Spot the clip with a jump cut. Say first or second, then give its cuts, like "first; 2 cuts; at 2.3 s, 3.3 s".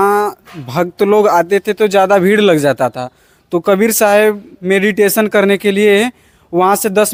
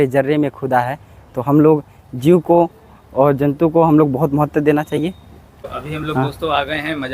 second; 1 cut; at 5.7 s